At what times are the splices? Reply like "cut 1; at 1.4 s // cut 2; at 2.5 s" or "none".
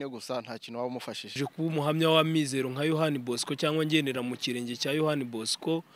cut 1; at 1.4 s